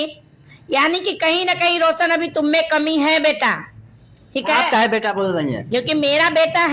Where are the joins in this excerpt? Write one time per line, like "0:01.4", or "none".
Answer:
none